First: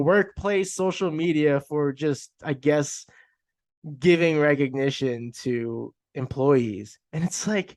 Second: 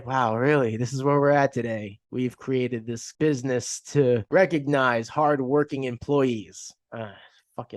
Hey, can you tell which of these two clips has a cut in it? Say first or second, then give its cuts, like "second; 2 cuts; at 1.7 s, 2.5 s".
second; 3 cuts; at 2.0 s, 3.1 s, 4.2 s